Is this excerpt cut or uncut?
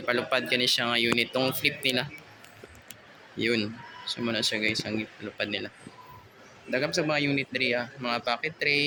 uncut